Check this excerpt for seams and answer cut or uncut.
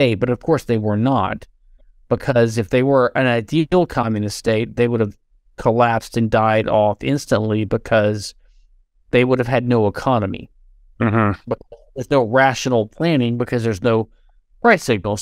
uncut